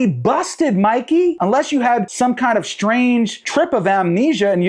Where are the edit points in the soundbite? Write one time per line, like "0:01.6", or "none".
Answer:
0:02.1